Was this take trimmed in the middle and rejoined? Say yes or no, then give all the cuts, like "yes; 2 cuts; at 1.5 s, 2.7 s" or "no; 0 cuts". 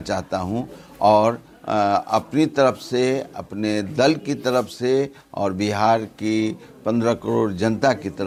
no; 0 cuts